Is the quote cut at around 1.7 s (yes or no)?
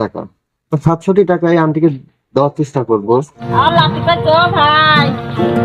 no